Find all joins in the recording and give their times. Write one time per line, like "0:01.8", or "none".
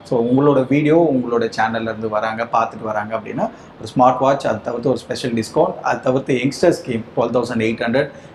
none